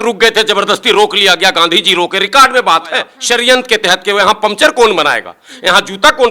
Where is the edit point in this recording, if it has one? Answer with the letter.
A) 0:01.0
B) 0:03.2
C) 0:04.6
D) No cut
B